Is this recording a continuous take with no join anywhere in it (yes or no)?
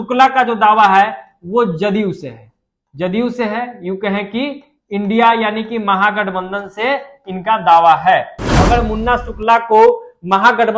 no